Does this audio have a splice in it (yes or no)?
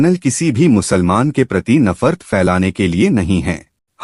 no